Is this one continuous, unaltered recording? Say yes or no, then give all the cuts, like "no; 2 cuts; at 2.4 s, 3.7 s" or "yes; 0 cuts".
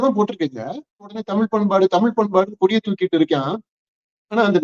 no; 1 cut; at 1.2 s